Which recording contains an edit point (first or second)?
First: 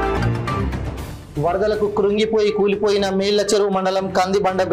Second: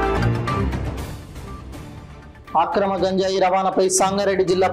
second